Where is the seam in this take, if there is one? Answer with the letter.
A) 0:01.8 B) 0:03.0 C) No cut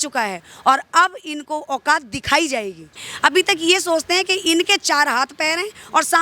B